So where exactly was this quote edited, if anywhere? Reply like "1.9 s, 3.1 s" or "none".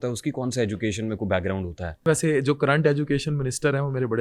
2.1 s